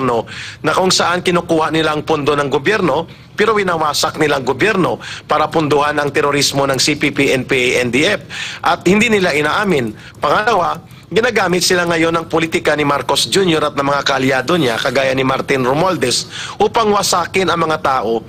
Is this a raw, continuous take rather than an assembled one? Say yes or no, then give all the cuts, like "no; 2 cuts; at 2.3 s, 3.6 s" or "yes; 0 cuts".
yes; 0 cuts